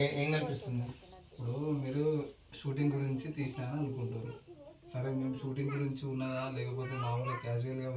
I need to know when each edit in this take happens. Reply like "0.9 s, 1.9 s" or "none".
none